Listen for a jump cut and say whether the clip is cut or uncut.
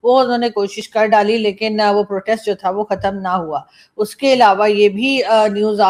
uncut